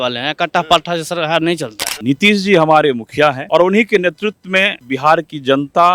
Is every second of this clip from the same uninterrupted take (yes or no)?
no